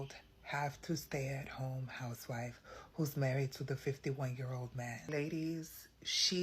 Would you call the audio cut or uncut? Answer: cut